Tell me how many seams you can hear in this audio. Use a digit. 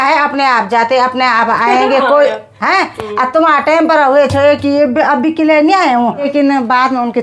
1